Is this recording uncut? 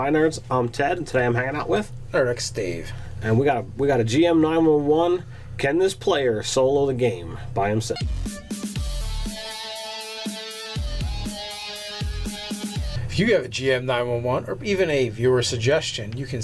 yes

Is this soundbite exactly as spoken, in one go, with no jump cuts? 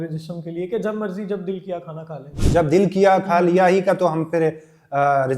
no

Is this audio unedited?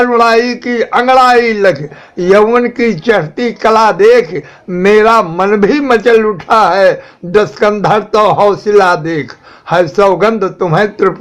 yes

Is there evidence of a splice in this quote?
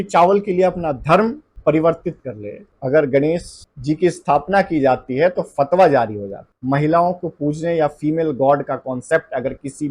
yes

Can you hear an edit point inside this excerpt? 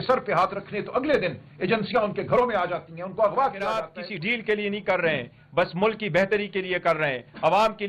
yes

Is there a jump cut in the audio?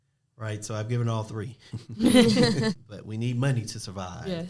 yes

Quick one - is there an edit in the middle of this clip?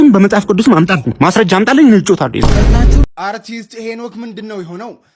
yes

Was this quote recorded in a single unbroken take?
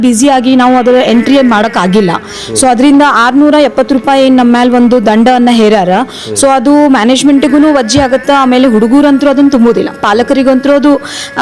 yes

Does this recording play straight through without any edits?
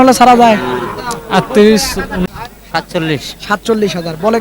no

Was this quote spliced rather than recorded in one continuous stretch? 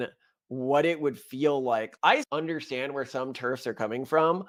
no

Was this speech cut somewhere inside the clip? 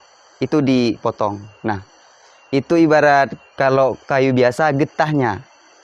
no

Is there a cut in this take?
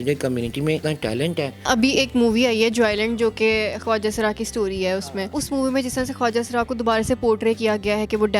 yes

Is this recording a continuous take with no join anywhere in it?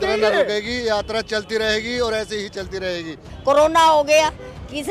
no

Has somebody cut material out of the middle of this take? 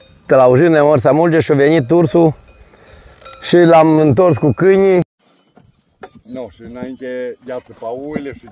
yes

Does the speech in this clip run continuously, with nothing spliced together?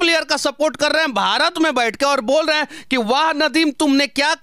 yes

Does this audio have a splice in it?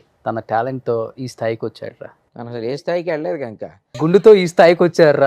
yes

